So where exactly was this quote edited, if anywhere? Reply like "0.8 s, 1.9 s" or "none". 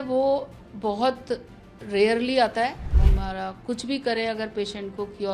3.0 s